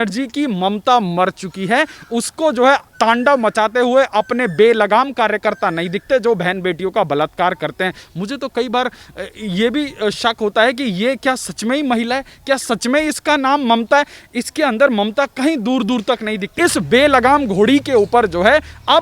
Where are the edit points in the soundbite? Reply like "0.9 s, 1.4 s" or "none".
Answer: 16.5 s